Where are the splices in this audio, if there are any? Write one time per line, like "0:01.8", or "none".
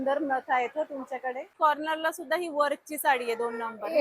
0:01.5